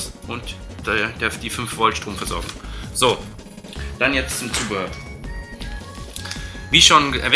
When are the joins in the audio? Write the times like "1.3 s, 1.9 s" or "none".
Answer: none